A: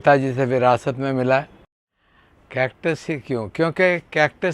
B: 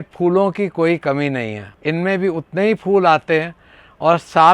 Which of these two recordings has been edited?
A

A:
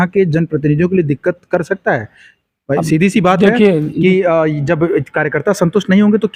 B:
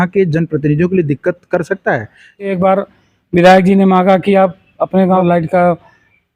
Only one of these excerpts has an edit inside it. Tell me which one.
B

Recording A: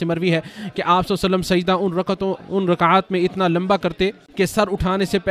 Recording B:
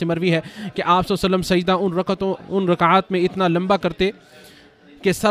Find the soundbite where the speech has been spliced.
A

